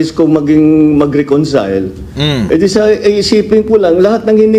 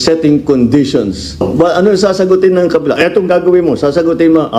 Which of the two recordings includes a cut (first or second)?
second